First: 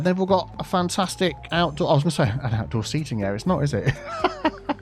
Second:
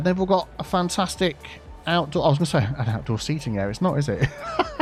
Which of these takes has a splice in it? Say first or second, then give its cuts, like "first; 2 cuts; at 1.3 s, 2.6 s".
first; 1 cut; at 1.4 s